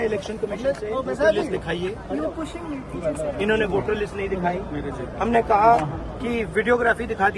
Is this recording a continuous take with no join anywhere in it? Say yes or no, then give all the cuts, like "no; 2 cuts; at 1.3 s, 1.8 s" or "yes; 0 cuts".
yes; 0 cuts